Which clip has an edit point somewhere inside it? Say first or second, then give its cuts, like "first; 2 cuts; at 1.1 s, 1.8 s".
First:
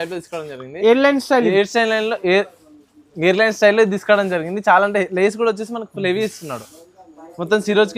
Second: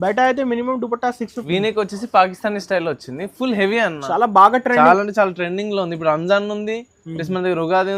second; 1 cut; at 1.3 s